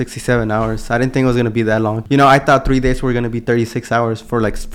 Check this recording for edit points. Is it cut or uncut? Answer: cut